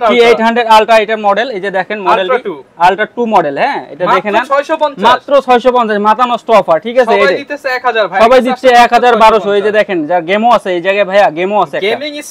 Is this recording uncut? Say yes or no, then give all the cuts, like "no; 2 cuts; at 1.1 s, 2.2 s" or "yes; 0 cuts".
yes; 0 cuts